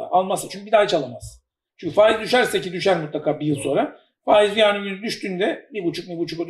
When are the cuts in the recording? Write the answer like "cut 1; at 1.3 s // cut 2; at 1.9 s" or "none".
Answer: none

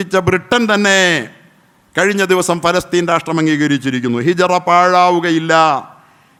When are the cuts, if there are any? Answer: none

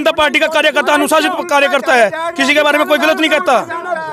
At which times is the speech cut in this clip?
none

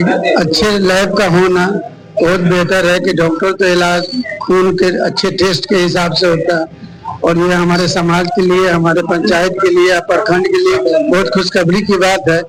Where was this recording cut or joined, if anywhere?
none

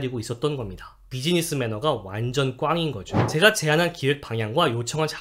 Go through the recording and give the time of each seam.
cut 1; at 3.1 s

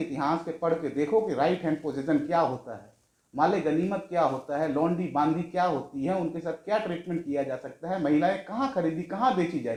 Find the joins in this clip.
none

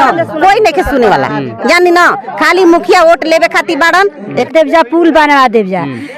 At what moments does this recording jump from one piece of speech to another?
cut 1; at 4.5 s

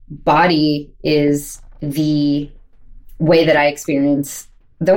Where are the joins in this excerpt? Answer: none

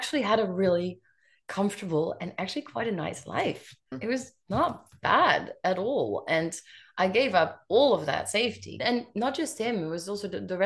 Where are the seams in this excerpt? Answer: cut 1; at 3.9 s // cut 2; at 8.8 s

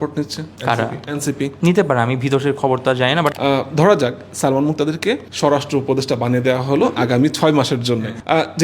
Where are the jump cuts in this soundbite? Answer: cut 1; at 3.3 s

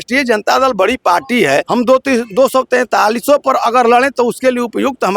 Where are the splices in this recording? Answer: cut 1; at 1.7 s

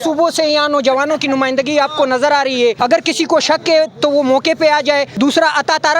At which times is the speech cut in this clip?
cut 1; at 2.8 s // cut 2; at 5.1 s

